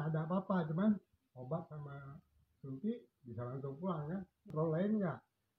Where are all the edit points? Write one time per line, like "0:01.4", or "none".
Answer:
0:04.4